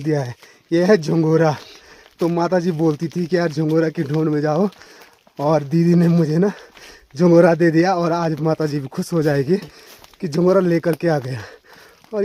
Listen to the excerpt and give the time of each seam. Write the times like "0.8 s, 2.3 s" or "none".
none